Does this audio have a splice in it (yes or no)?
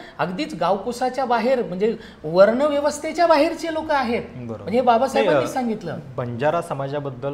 no